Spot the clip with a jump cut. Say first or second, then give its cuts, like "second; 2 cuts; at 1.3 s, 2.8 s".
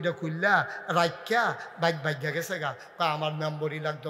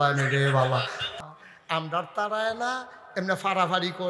second; 1 cut; at 1.1 s